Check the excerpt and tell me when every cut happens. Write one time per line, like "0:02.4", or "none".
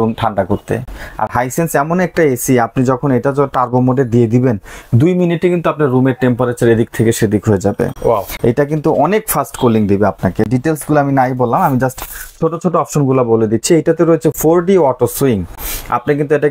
none

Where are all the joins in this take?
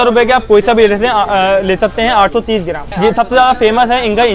0:02.9

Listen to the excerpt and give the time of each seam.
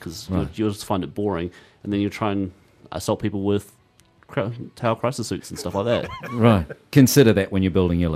0:06.9

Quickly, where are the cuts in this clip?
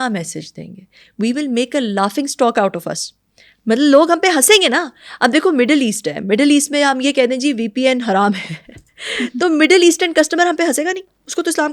none

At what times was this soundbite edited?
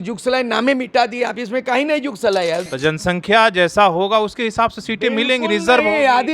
0:02.7

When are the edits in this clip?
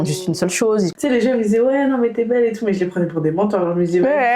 0:00.9

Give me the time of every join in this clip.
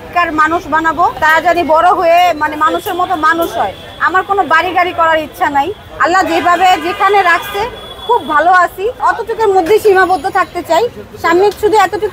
none

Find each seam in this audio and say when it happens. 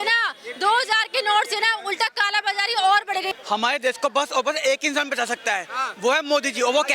0:03.3

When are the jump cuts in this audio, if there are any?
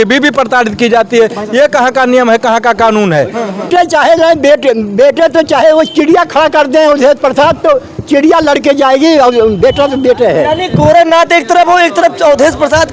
0:03.7

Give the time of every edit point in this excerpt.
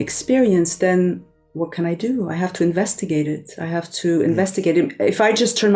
none

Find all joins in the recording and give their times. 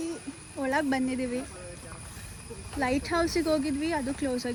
none

